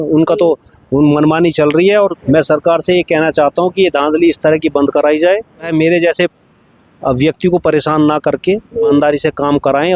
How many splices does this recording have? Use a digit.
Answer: 3